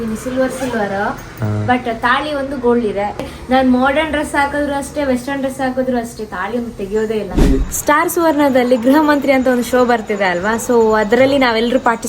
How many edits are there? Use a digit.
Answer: 2